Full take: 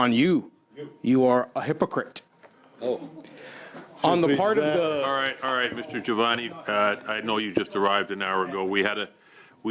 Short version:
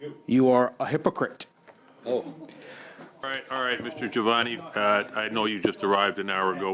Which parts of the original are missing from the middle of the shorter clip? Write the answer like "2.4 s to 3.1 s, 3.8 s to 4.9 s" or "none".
4.0 s to 5.1 s